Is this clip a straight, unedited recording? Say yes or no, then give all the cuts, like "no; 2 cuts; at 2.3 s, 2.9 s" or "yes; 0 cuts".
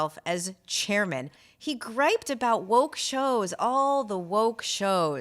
no; 1 cut; at 1.5 s